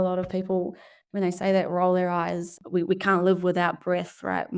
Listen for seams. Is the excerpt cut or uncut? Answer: cut